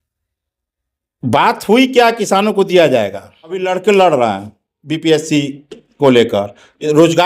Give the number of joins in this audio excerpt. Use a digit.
1